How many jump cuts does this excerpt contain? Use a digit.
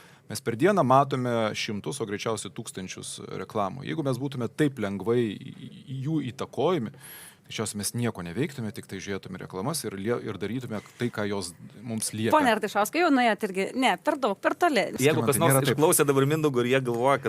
1